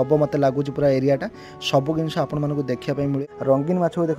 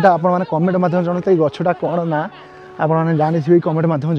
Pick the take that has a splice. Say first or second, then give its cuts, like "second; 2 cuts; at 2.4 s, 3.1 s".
first; 1 cut; at 3.2 s